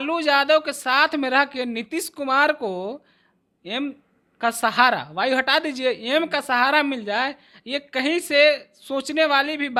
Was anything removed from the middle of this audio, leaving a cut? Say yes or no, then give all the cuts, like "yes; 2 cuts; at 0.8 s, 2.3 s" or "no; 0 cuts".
no; 0 cuts